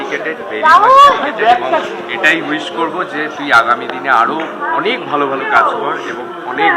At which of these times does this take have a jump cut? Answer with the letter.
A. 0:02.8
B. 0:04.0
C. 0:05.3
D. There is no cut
D